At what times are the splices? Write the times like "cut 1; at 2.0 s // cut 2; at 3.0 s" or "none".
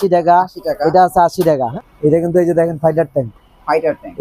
cut 1; at 1.7 s